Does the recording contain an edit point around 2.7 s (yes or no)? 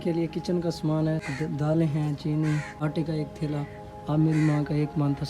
yes